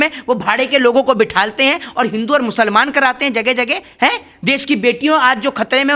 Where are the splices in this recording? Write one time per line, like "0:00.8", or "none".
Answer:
none